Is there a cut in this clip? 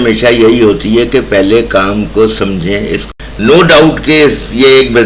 yes; 1 cut; at 3.0 s

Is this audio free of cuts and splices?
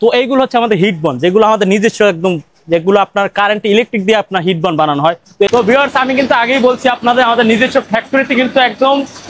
no; 1 cut; at 5.5 s

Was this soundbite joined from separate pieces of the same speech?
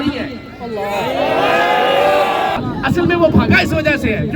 yes; 1 cut; at 2.6 s

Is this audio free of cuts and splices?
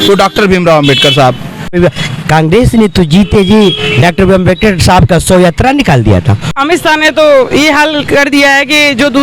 no; 2 cuts; at 1.8 s, 6.6 s

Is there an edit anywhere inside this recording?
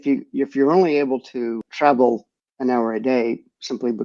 yes; 1 cut; at 1.6 s

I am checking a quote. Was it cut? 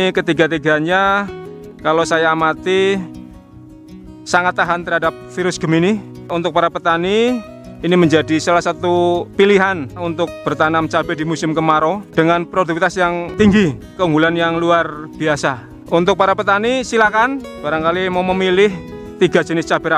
yes; 2 cuts; at 6.3 s, 13.8 s

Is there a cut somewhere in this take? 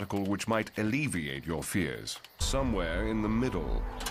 no; 0 cuts

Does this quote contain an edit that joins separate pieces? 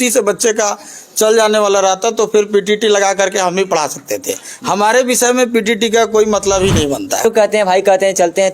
yes; 1 cut; at 7.2 s

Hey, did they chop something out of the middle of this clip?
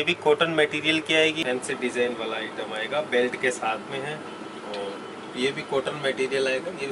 yes; 1 cut; at 1.4 s

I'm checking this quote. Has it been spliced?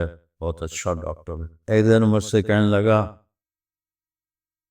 yes; 1 cut; at 1.6 s

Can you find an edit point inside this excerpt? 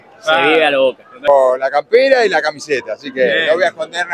yes; 1 cut; at 1.3 s

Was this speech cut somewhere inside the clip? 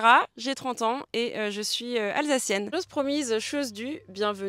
yes; 1 cut; at 2.7 s

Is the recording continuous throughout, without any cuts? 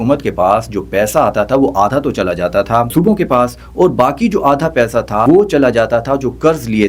no; 2 cuts; at 2.9 s, 5.2 s

